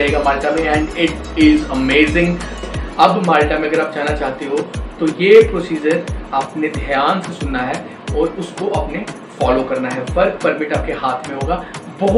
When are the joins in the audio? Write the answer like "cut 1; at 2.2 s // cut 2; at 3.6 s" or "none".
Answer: cut 1; at 2.7 s